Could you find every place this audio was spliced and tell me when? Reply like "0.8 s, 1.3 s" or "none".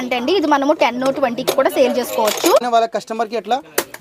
2.6 s